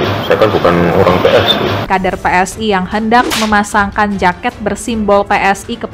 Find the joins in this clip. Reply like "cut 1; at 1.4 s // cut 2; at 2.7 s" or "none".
cut 1; at 1.9 s